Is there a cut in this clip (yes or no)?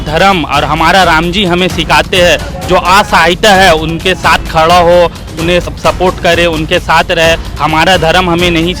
yes